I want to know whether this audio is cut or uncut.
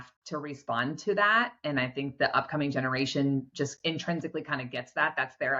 uncut